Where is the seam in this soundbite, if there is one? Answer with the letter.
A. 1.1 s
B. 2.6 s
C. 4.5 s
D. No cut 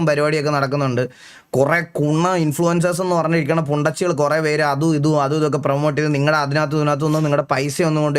D